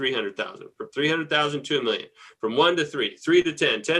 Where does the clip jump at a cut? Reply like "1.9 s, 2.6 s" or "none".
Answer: none